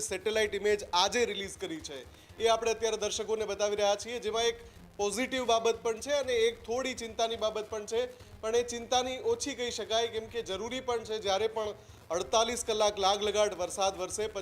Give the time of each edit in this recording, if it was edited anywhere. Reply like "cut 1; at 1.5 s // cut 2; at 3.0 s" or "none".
none